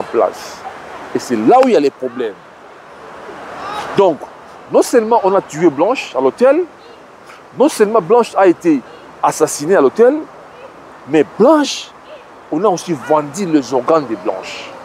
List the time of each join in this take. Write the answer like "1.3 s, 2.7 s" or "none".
none